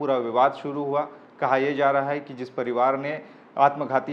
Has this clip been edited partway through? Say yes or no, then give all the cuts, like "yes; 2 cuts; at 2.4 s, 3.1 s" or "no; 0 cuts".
no; 0 cuts